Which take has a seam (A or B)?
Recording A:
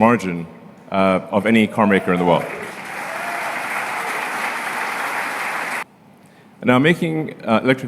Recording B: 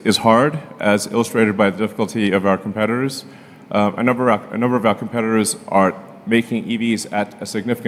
A